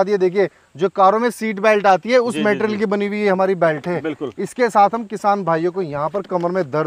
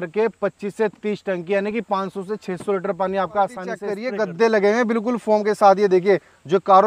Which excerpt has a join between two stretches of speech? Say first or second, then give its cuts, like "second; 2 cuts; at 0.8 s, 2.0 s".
second; 1 cut; at 4.0 s